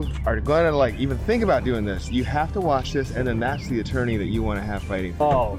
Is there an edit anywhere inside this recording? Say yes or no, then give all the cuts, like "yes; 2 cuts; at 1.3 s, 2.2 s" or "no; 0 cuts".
no; 0 cuts